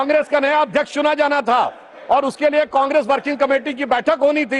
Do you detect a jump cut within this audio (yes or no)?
no